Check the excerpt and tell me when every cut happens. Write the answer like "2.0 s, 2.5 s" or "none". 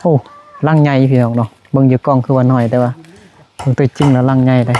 none